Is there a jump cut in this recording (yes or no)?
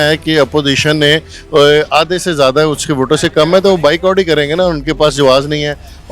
no